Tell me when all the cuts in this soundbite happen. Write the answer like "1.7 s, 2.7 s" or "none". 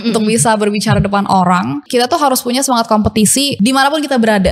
1.8 s, 3.5 s